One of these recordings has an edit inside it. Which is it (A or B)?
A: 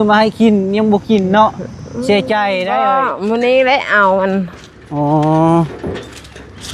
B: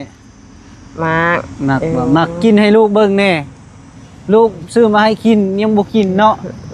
A